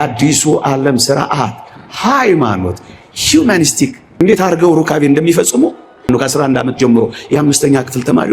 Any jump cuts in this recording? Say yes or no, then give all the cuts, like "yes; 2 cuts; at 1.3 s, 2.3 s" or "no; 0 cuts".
yes; 1 cut; at 4.0 s